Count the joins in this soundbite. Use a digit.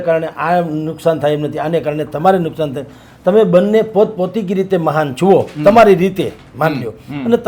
0